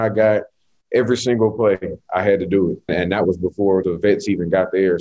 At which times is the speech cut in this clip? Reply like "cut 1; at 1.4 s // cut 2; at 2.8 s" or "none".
cut 1; at 2.8 s // cut 2; at 3.8 s